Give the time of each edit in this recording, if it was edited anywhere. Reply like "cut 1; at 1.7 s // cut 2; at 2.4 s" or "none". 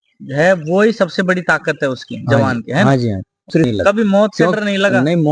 cut 1; at 3.7 s